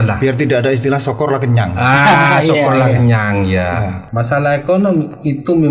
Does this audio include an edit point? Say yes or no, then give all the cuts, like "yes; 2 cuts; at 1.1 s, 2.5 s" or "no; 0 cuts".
yes; 1 cut; at 4.0 s